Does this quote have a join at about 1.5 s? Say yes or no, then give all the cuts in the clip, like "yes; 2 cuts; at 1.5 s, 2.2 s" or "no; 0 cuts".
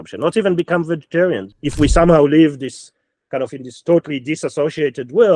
yes; 1 cut; at 1.5 s